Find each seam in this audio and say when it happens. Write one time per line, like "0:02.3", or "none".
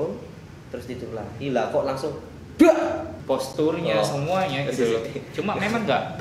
0:03.1

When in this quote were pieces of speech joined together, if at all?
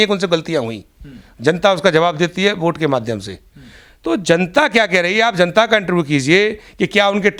none

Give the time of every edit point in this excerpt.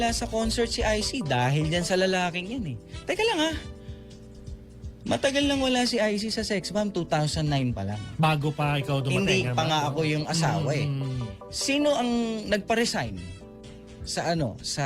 0:01.1

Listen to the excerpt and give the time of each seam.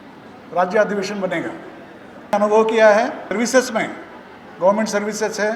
0:02.3
0:03.3

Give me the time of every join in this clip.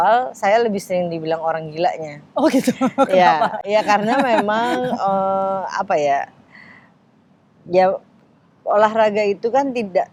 none

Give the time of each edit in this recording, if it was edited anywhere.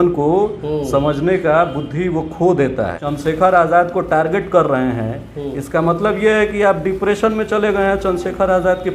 0:03.0

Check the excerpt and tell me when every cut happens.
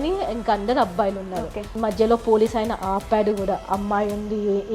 0:01.7

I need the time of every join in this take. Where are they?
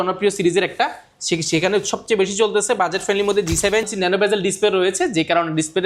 0:03.9

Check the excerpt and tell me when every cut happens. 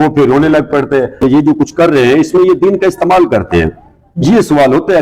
0:01.2

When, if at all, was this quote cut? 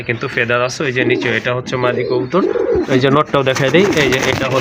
none

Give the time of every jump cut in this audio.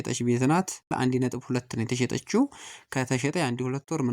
0:00.9

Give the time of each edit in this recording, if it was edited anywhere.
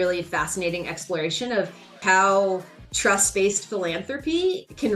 0:02.0

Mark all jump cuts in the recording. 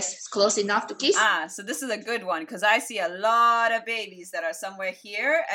0:01.2

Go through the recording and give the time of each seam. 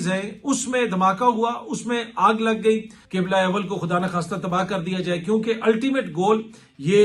0:03.0

